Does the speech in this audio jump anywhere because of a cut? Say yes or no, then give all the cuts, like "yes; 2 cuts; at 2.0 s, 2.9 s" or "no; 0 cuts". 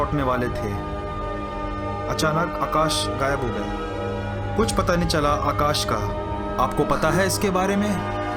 no; 0 cuts